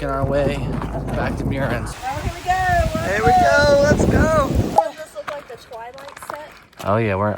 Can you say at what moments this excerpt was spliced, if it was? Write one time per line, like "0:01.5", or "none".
0:01.9
0:04.8